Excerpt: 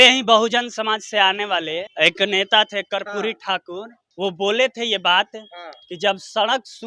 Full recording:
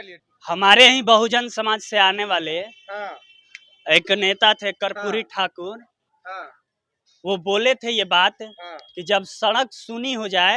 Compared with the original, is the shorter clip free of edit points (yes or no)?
no